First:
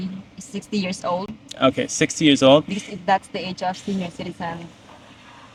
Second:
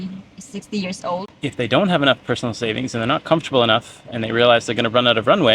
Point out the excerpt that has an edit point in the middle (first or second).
second